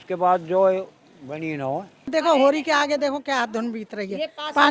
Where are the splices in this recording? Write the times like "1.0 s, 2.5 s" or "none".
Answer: 2.1 s